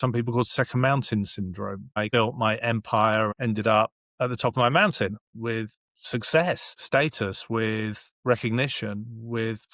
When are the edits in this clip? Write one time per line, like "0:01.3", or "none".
0:02.0
0:03.3
0:05.3
0:06.7